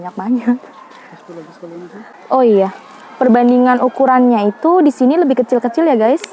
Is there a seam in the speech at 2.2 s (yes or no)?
yes